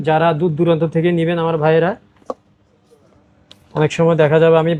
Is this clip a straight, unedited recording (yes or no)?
yes